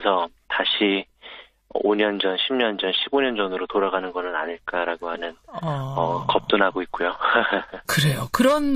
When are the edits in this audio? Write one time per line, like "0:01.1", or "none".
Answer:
none